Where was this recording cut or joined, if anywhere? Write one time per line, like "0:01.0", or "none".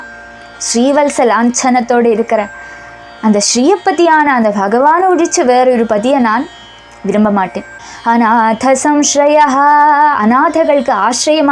0:07.6